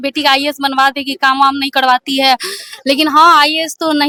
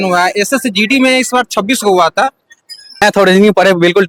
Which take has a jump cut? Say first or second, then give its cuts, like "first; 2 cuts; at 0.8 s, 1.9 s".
second; 1 cut; at 3.0 s